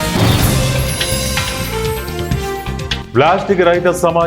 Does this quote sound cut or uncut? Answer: cut